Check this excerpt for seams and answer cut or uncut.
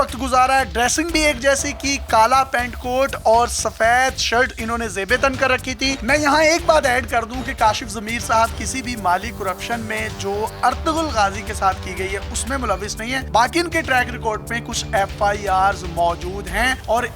uncut